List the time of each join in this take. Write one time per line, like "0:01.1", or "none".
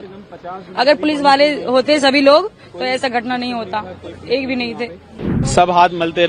0:05.2